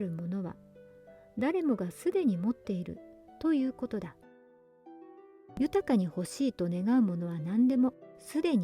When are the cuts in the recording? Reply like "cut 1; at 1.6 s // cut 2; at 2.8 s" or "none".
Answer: cut 1; at 4.2 s // cut 2; at 5.6 s